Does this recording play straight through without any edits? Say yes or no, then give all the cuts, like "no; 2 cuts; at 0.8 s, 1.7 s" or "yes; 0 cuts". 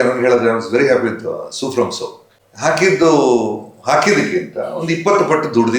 yes; 0 cuts